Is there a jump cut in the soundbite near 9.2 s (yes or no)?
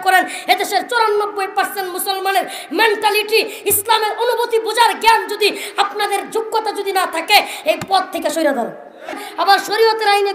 yes